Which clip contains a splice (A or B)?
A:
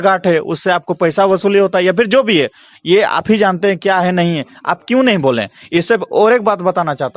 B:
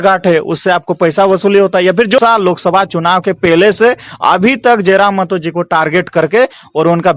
B